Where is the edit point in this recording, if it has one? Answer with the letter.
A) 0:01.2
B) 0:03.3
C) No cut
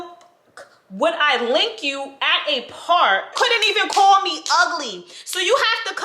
B